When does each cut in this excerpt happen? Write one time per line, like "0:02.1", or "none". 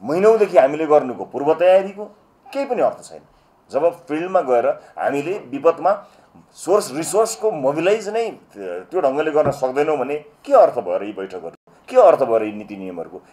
none